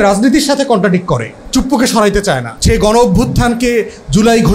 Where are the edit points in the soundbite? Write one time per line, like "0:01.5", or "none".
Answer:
0:01.3
0:02.5